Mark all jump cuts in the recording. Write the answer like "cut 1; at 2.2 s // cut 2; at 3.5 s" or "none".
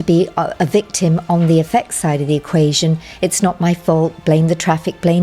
none